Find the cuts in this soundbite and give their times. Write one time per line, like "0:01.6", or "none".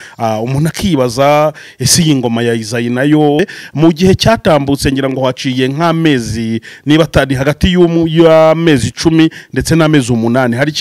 0:03.4